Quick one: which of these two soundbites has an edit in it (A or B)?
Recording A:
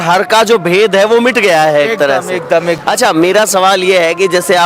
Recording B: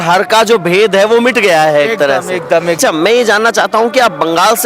B